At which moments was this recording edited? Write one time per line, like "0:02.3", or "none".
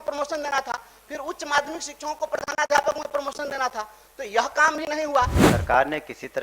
0:05.4